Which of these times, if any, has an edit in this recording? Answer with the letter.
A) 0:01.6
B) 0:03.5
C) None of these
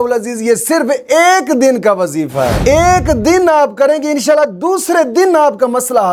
C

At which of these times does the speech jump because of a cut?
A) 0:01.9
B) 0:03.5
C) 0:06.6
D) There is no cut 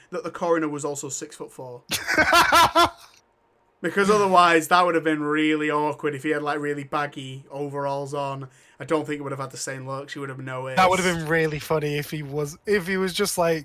A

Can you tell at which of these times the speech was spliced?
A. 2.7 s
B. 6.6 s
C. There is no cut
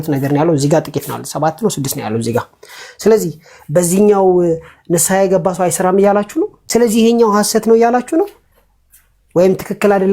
B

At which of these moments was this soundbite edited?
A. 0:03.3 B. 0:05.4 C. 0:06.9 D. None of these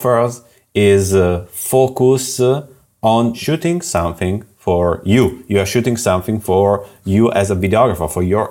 A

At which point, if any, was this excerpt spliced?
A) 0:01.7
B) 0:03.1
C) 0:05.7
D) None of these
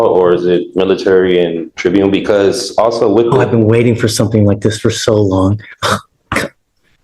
A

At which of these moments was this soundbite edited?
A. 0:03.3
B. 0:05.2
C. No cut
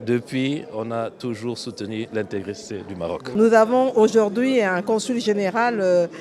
A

